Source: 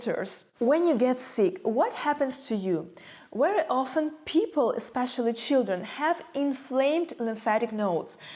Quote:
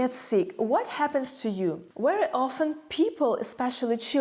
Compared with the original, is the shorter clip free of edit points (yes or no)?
no